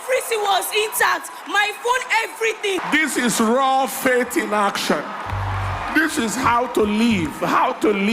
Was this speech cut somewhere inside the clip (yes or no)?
yes